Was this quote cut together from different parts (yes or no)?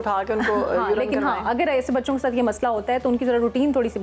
no